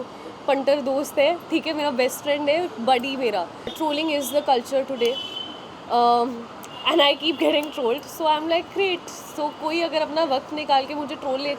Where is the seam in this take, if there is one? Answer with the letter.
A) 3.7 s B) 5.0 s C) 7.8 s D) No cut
A